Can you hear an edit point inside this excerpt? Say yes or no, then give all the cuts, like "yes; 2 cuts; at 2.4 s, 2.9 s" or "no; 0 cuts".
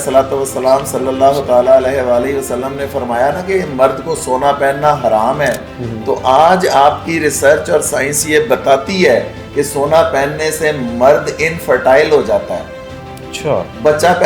no; 0 cuts